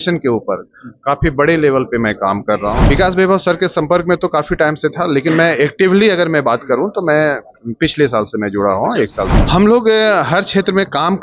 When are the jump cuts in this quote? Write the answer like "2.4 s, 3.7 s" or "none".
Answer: 2.9 s, 9.4 s